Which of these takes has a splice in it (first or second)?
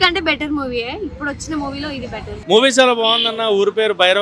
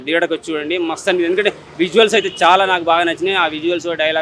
first